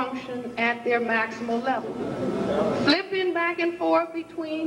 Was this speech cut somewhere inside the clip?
yes; 1 cut; at 1.9 s

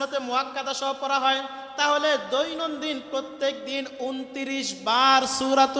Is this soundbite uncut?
yes; 0 cuts

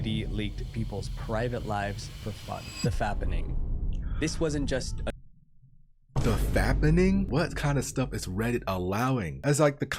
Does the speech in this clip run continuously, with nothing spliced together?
no; 1 cut; at 6.0 s

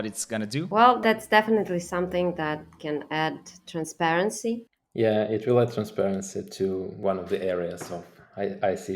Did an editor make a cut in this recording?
yes; 3 cuts; at 1.0 s, 4.8 s, 6.9 s

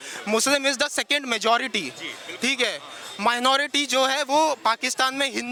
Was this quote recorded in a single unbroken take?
yes; 0 cuts

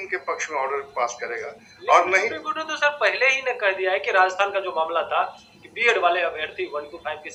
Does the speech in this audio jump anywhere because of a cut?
no; 0 cuts

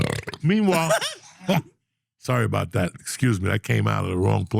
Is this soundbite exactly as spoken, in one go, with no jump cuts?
yes; 0 cuts

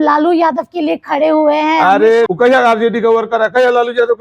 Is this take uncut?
no; 1 cut; at 2.3 s

